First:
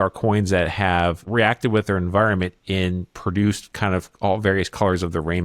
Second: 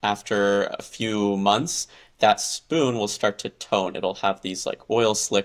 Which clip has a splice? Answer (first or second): first